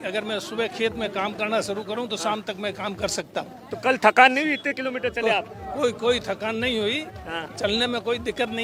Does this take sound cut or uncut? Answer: uncut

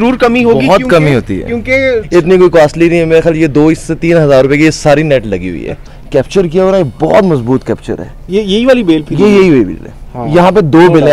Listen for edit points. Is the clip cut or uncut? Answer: cut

